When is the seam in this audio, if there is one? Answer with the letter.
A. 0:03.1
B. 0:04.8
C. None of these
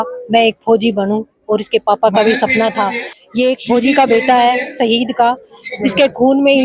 A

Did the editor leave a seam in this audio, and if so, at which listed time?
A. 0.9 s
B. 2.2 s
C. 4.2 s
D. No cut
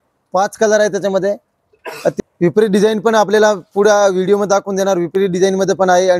B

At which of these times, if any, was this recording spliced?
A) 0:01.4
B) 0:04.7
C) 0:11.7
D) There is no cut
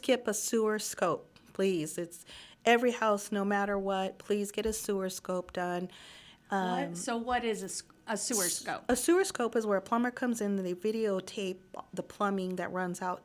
D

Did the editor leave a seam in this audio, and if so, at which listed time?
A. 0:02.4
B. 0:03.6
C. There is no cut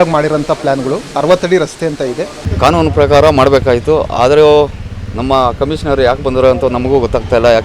A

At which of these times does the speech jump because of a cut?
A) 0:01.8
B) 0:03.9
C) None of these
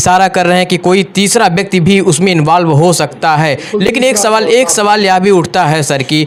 C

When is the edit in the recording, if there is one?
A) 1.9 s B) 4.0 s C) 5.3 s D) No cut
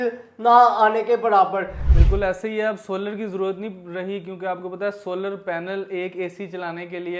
A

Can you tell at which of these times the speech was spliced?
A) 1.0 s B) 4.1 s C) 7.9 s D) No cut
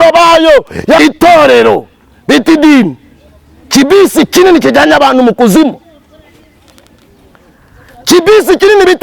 A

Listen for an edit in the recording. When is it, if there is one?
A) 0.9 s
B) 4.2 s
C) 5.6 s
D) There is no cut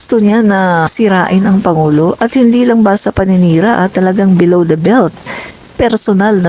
A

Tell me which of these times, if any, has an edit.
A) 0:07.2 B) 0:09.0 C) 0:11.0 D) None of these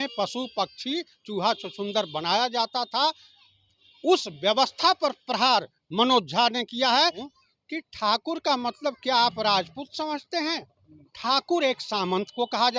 A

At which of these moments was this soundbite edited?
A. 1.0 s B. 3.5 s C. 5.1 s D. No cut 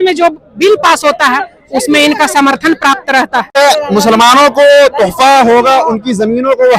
B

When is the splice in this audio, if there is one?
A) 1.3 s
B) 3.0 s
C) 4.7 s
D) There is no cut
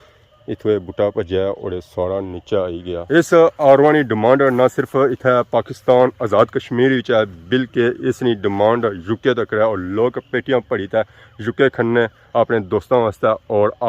B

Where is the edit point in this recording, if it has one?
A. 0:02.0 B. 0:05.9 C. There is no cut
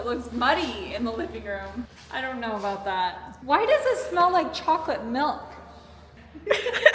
A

